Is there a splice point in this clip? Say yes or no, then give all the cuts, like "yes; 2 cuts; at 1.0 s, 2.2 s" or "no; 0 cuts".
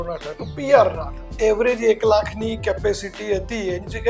yes; 1 cut; at 1.3 s